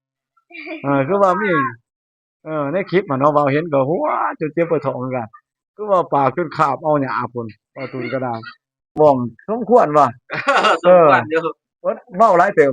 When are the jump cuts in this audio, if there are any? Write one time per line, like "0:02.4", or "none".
0:08.9